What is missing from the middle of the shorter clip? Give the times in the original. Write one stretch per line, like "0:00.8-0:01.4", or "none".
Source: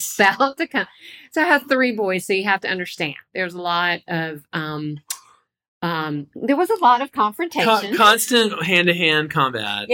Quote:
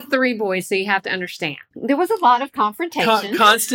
0:03.3-0:06.3